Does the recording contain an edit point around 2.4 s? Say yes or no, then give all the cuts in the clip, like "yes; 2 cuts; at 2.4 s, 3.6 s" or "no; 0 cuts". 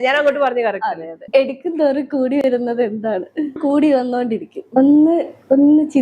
no; 3 cuts; at 1.1 s, 3.6 s, 4.6 s